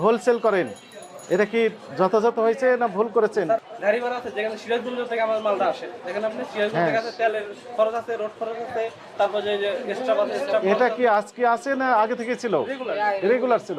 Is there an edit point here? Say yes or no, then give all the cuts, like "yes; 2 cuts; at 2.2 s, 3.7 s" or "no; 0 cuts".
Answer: yes; 1 cut; at 3.6 s